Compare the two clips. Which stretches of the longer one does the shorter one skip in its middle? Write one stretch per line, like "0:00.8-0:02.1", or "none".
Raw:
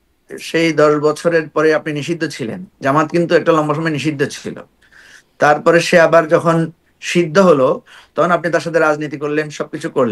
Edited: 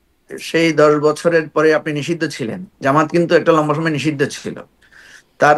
none